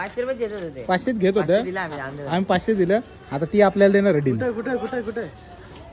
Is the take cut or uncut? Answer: uncut